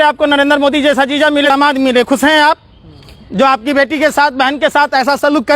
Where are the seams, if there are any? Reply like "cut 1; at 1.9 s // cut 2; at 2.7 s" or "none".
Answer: cut 1; at 1.5 s